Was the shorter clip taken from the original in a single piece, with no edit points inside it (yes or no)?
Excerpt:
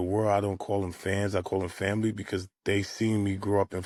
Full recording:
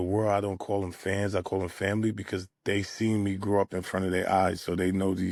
yes